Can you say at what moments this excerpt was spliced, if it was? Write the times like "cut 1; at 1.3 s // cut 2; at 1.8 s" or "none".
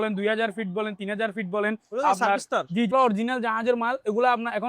cut 1; at 2.9 s

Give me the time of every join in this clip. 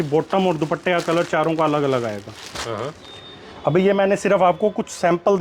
none

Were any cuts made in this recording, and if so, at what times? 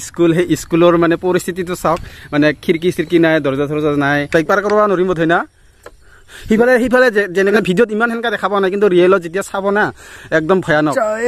cut 1; at 4.3 s // cut 2; at 7.5 s

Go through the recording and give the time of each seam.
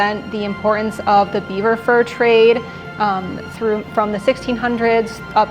none

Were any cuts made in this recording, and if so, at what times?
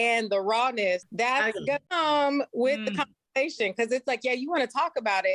cut 1; at 1.1 s // cut 2; at 1.9 s

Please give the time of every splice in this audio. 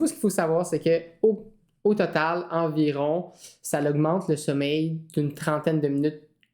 none

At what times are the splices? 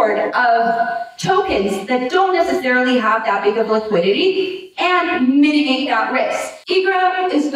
cut 1; at 6.5 s

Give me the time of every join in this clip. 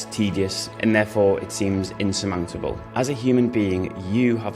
cut 1; at 2.8 s

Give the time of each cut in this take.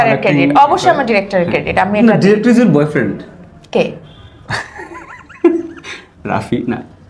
none

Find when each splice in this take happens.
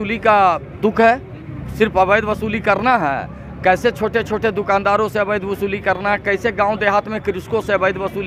none

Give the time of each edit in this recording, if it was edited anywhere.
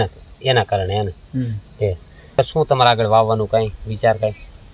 cut 1; at 2.4 s

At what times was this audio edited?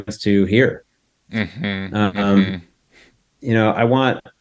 none

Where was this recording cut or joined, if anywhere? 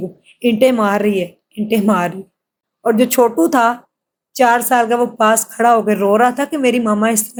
none

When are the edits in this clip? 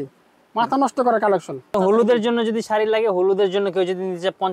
cut 1; at 1.7 s

